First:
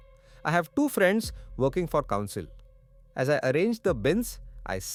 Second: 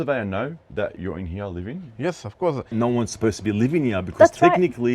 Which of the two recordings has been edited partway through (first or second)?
second